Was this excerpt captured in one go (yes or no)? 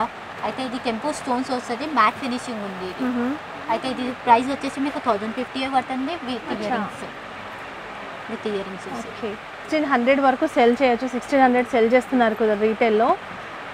yes